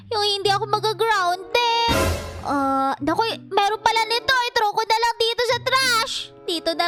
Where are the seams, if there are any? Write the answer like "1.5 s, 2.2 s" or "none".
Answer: none